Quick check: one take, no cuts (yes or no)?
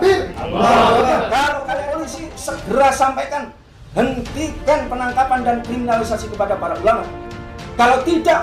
no